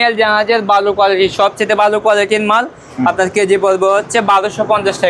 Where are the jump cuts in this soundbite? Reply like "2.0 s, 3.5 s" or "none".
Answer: none